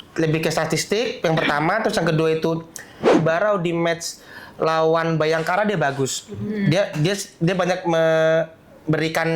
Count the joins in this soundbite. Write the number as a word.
one